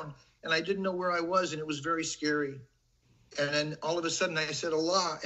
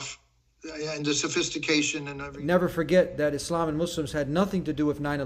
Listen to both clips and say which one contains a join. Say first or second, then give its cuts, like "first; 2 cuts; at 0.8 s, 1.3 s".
second; 1 cut; at 2.2 s